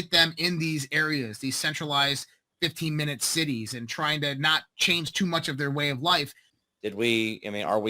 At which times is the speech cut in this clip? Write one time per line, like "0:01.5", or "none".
0:06.5